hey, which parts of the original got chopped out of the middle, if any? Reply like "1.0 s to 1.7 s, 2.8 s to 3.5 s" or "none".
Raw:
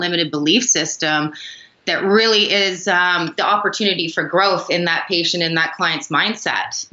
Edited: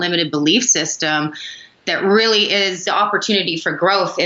2.8 s to 3.3 s